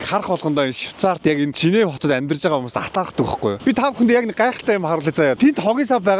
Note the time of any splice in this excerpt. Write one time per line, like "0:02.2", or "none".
0:03.6
0:05.4